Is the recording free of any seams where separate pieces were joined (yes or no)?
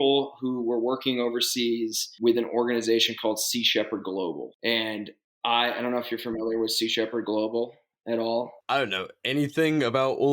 no